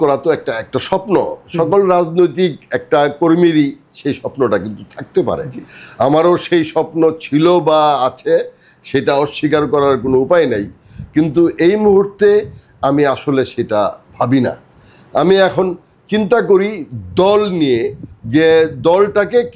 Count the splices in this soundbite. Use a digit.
0